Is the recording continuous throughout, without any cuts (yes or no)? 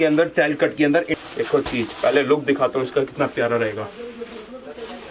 no